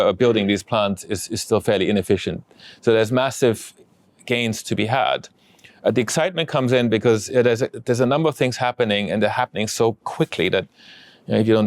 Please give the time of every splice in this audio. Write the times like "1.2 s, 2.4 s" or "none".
none